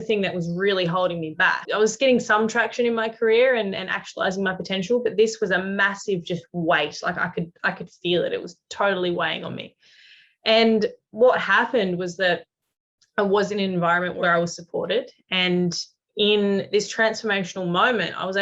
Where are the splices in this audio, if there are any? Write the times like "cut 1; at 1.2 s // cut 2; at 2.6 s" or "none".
cut 1; at 1.6 s // cut 2; at 14.2 s